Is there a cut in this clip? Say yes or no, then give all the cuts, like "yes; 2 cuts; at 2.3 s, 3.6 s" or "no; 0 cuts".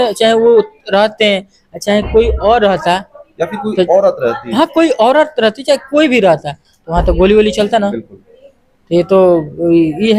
no; 0 cuts